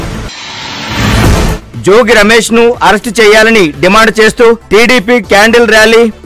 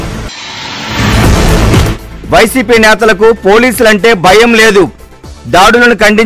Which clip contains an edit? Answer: first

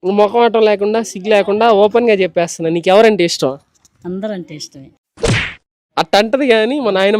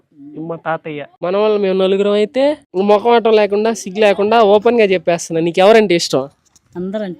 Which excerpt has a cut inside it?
second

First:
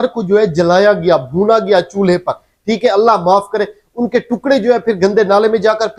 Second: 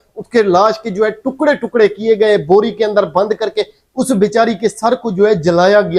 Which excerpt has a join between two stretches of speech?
second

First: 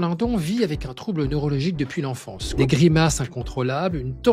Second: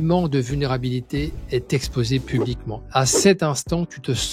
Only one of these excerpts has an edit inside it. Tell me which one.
first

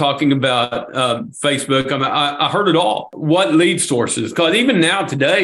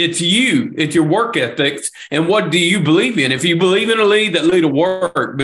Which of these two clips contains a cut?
first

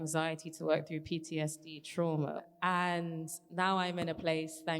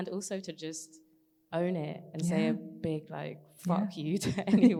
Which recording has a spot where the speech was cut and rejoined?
first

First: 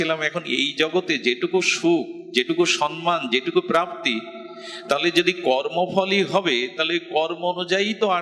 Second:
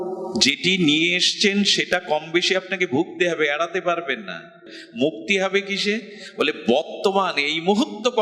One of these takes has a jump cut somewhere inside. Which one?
second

